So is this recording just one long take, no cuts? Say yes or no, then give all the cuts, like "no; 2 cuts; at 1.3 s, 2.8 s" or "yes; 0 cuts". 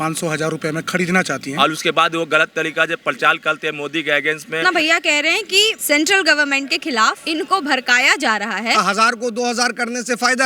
no; 5 cuts; at 1.5 s, 4.6 s, 5.8 s, 7.2 s, 8.8 s